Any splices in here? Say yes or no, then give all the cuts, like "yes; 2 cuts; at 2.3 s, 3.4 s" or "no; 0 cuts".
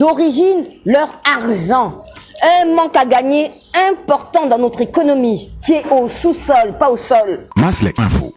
yes; 1 cut; at 7.4 s